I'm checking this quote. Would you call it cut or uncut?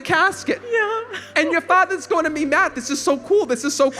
cut